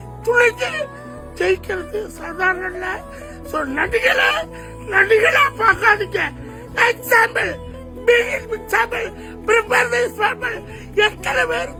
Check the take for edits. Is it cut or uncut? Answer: uncut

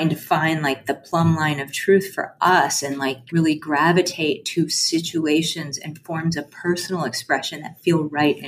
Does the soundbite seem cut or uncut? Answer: cut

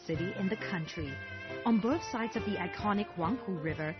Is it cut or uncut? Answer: uncut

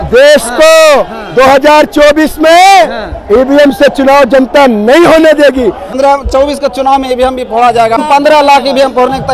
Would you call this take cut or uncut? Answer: cut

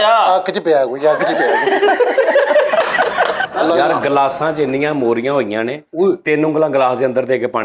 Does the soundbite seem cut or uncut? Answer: cut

